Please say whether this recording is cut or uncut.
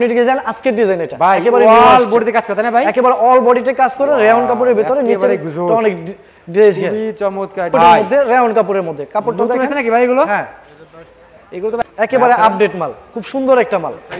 cut